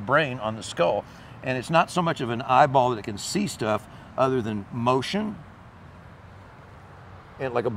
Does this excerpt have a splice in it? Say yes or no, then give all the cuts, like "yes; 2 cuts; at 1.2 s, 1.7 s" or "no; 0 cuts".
no; 0 cuts